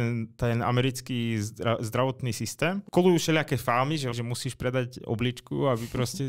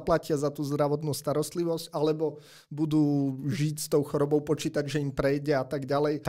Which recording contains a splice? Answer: first; 2 cuts; at 2.8 s, 4.1 s

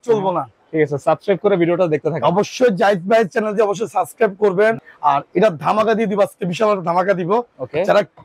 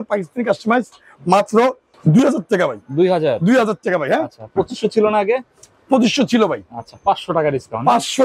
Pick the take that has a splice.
first; 1 cut; at 4.8 s

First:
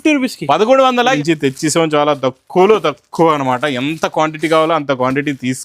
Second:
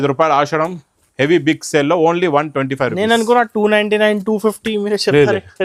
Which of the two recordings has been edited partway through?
first; 1 cut; at 1.1 s

